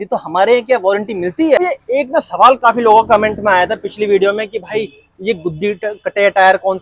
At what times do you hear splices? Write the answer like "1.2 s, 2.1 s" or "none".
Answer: 1.6 s